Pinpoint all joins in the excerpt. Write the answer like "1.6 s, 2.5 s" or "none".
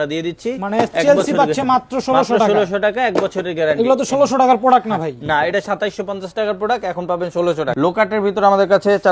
7.7 s

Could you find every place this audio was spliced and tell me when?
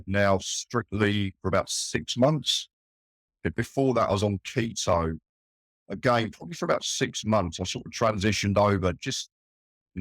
none

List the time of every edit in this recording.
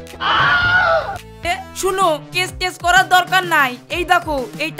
1.6 s

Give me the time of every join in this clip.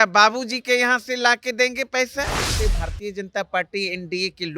2.5 s

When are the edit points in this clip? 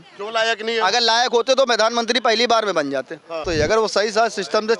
3.4 s

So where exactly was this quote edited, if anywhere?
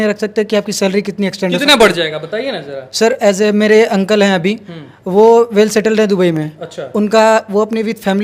none

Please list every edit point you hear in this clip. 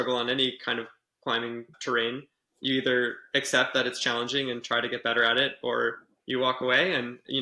1.7 s

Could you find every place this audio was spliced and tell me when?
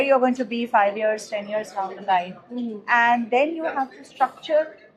none

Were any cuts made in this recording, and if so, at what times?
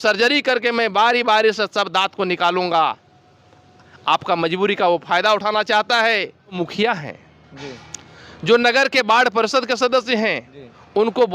6.5 s

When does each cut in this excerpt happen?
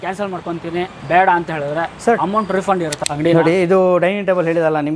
1.0 s, 2.9 s

